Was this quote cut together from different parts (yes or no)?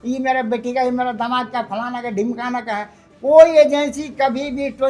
no